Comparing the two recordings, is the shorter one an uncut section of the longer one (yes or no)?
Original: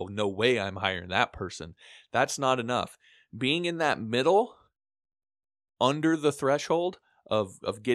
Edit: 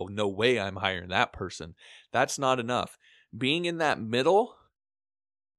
yes